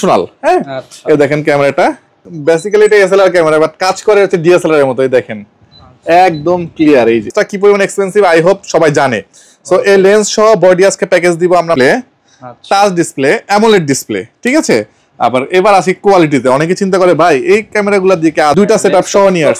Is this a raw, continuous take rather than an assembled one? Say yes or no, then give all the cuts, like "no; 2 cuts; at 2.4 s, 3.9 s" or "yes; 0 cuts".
no; 4 cuts; at 2.2 s, 7.3 s, 11.8 s, 18.5 s